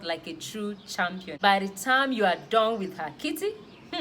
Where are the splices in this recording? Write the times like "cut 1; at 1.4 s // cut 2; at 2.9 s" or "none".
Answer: cut 1; at 1.3 s